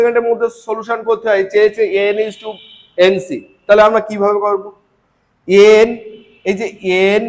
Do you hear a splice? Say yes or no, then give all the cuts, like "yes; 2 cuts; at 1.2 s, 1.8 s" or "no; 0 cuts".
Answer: no; 0 cuts